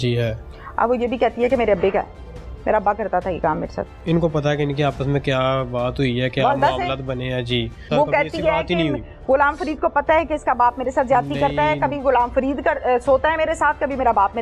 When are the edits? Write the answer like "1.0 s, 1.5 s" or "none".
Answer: 4.0 s, 7.8 s